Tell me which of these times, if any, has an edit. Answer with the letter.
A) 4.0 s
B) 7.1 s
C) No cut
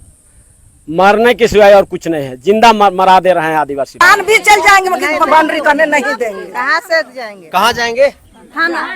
A